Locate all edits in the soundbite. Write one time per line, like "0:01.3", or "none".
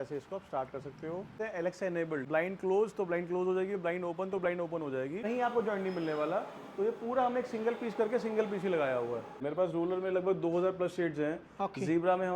0:01.3
0:02.2
0:05.2
0:09.5